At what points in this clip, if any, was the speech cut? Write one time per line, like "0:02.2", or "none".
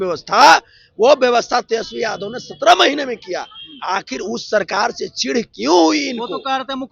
none